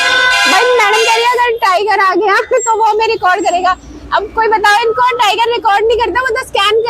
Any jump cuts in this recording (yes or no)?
no